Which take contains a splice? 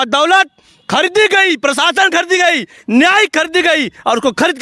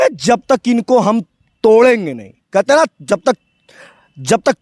second; 1 cut; at 1.4 s

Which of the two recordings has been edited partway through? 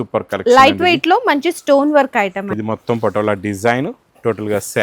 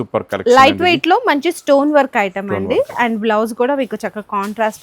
first; 1 cut; at 2.5 s

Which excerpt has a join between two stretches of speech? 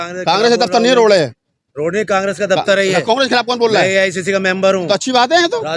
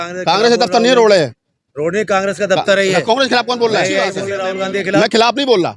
second; 1 cut; at 4.3 s

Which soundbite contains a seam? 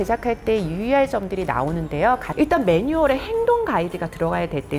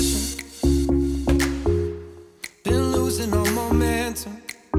first; 1 cut; at 2.3 s

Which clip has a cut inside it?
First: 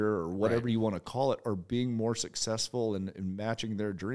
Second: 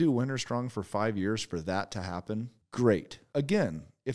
second; 2 cuts; at 2.6 s, 3.2 s

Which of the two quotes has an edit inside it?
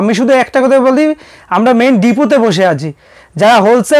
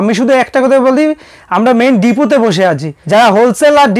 second; 1 cut; at 2.9 s

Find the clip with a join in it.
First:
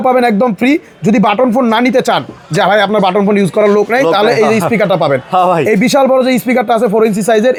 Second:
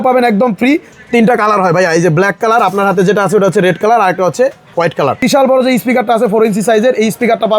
second; 2 cuts; at 0.9 s, 5.2 s

